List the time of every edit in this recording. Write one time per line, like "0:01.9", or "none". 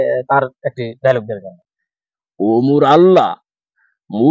0:01.5